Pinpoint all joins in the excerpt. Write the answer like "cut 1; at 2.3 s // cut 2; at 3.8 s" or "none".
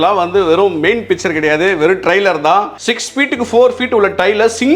cut 1; at 2.8 s